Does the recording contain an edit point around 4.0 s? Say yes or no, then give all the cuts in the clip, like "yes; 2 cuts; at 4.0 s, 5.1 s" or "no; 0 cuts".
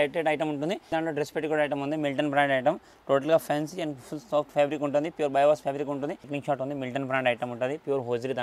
no; 2 cuts; at 0.9 s, 6.3 s